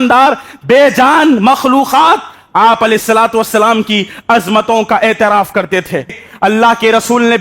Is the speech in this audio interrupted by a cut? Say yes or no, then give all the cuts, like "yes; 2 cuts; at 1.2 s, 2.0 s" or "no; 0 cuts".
yes; 1 cut; at 6.2 s